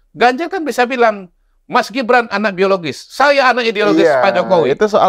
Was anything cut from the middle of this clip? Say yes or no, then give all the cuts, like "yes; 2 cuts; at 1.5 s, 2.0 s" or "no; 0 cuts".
no; 0 cuts